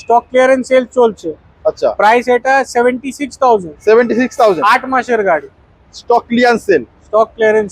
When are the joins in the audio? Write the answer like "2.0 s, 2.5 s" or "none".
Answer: none